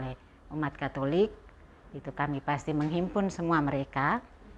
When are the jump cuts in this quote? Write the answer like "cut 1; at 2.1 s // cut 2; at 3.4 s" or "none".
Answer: none